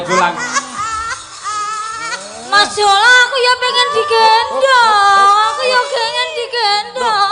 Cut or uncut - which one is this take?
uncut